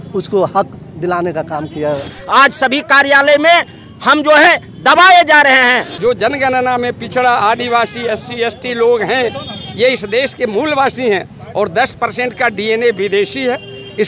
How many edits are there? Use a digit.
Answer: 2